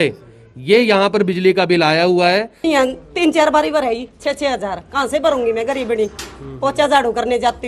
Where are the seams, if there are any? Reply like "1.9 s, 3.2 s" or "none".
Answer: 2.6 s